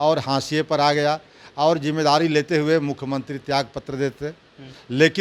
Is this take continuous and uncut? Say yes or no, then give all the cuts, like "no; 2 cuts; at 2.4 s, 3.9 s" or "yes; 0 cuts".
yes; 0 cuts